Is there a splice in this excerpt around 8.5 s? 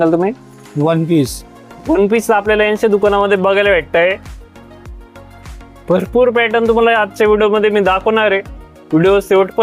no; 0 cuts

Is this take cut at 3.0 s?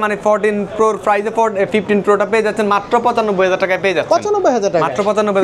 no; 0 cuts

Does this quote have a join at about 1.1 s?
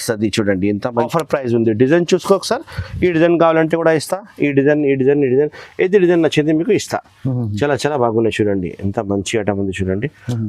yes; 1 cut; at 1.1 s

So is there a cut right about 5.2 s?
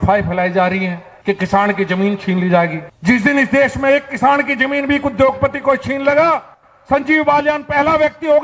no; 2 cuts; at 1.1 s, 2.9 s

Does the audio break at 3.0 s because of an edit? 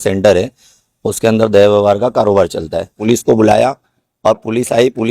yes; 1 cut; at 3.0 s

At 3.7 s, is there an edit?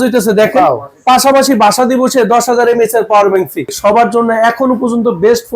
yes; 1 cut; at 3.7 s

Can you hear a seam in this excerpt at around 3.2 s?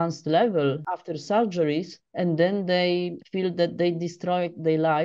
yes; 3 cuts; at 0.9 s, 2.0 s, 3.2 s

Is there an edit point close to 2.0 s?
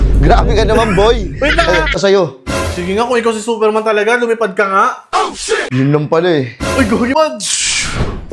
yes; 2 cuts; at 2.0 s, 7.1 s

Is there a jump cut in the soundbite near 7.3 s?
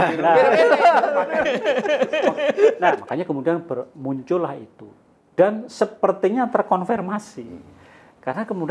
no; 1 cut; at 3.0 s

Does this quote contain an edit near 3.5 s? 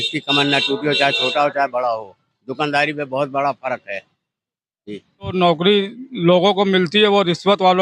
no; 1 cut; at 5.3 s

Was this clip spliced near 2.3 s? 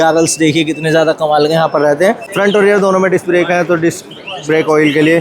yes; 1 cut; at 2.3 s

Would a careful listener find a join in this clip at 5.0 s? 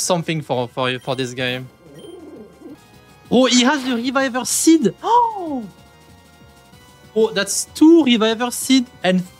no; 1 cut; at 2.8 s

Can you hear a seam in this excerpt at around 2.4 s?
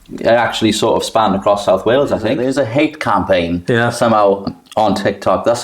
yes; 2 cuts; at 2.4 s, 4.6 s

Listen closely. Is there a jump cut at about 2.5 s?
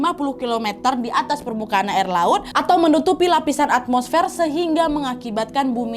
yes; 1 cut; at 2.5 s

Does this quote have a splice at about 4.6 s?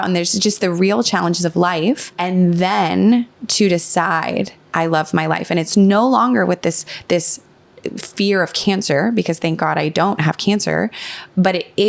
yes; 2 cuts; at 2.1 s, 4.6 s

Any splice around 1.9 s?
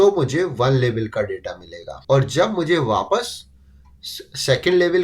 yes; 1 cut; at 1.9 s

